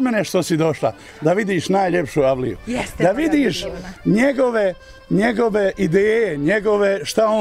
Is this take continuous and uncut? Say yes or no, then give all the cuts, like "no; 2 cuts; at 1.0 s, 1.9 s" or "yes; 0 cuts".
yes; 0 cuts